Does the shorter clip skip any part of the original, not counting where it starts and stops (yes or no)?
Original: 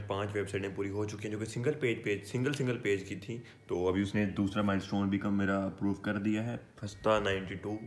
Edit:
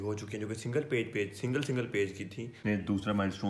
yes